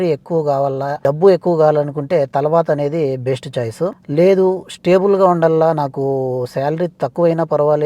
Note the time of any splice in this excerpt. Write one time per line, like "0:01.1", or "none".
0:01.0
0:04.0